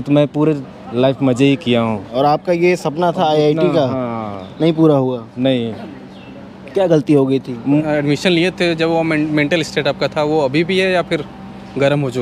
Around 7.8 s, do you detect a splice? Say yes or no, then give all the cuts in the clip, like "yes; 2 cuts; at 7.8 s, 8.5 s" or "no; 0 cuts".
yes; 2 cuts; at 2.1 s, 7.8 s